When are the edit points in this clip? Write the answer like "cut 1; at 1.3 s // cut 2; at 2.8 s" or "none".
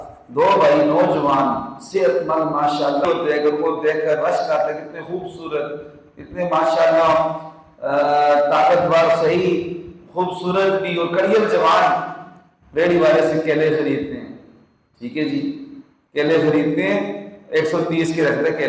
cut 1; at 3.0 s